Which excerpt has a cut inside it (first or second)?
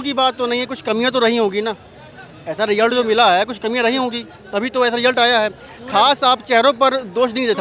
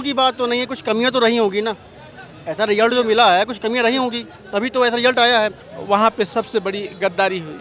second